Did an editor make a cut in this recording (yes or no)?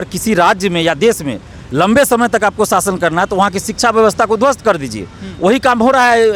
no